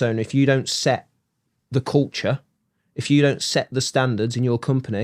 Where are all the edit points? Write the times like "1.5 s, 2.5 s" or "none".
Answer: none